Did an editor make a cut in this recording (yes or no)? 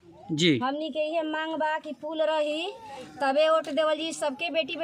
no